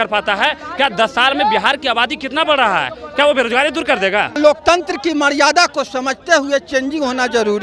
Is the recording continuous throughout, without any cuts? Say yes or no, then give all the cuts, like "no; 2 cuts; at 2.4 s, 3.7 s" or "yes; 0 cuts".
no; 1 cut; at 4.4 s